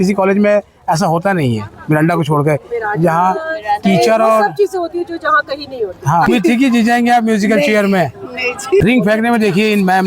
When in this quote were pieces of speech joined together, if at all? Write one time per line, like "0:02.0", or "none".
0:06.2
0:08.8